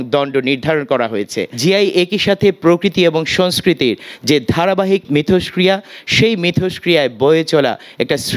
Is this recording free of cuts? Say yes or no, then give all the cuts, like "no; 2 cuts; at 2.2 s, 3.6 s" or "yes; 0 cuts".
no; 2 cuts; at 1.4 s, 5.0 s